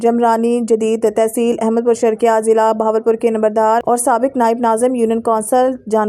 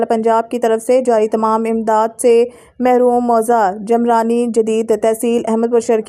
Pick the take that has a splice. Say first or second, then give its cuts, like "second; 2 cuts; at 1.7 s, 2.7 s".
first; 1 cut; at 3.8 s